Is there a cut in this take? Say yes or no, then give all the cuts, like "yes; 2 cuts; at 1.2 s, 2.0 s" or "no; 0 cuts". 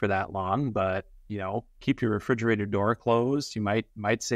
no; 0 cuts